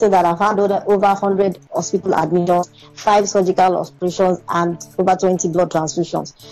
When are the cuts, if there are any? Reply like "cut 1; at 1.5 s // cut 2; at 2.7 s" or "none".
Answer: none